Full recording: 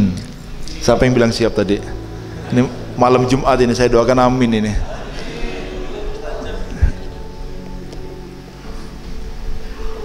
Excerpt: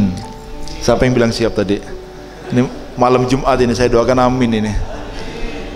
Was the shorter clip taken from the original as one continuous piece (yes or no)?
yes